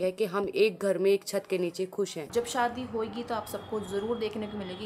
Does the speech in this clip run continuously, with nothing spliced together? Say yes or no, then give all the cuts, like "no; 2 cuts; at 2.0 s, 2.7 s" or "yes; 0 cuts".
no; 1 cut; at 2.3 s